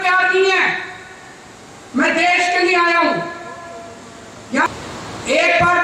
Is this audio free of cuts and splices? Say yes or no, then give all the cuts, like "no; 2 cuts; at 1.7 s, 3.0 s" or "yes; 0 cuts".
no; 1 cut; at 4.7 s